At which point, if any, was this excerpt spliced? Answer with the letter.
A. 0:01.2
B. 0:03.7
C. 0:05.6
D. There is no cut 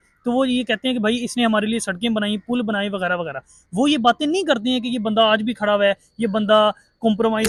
D